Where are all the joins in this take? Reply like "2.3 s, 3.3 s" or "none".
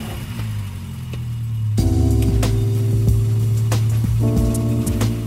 none

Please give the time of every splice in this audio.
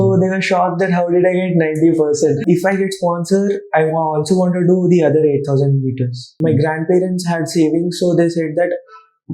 2.4 s, 6.3 s

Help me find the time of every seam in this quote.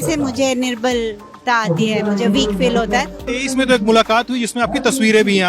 3.1 s

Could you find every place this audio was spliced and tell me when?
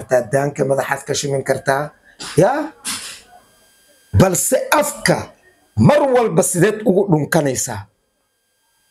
none

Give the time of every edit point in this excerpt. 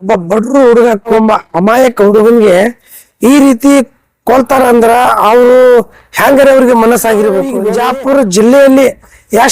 1.1 s, 7.6 s

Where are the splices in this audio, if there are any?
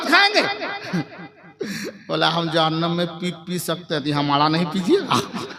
none

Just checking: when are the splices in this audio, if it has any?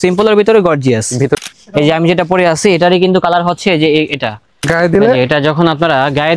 1.3 s, 4.6 s

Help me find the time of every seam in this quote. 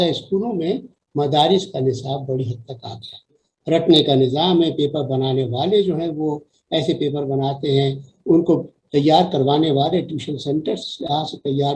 3.5 s

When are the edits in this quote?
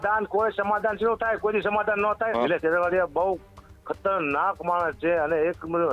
2.3 s

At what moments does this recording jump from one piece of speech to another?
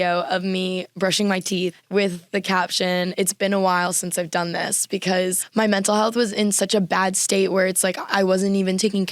1.8 s, 5.4 s

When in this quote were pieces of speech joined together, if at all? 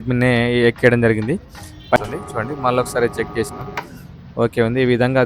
2.0 s

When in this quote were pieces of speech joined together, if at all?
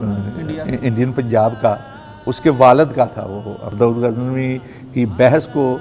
3.7 s

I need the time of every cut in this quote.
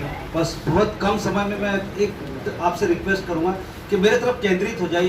none

